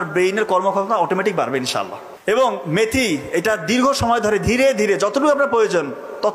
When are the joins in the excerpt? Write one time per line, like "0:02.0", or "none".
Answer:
0:02.0